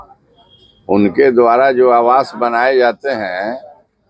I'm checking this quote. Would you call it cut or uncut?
uncut